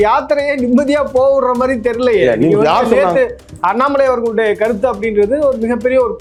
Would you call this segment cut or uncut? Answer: uncut